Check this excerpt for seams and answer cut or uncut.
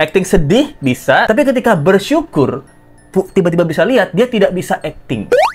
cut